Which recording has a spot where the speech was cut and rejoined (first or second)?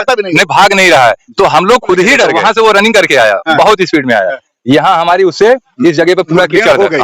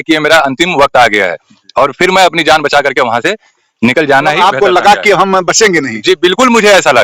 first